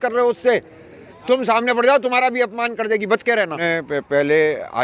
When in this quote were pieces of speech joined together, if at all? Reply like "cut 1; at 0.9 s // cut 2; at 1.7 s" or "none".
cut 1; at 3.6 s